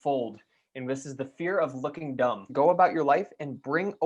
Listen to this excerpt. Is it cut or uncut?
cut